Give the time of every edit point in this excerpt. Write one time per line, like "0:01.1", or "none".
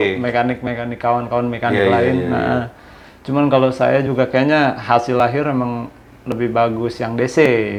none